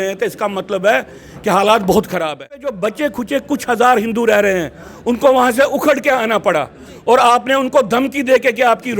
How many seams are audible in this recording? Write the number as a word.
one